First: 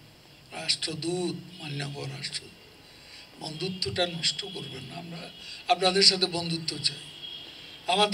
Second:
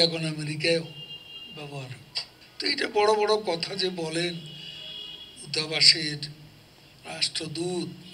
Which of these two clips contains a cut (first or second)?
second